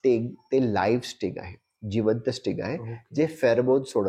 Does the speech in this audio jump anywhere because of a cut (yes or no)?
no